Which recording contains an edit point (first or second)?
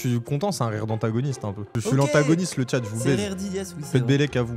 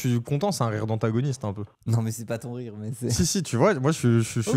first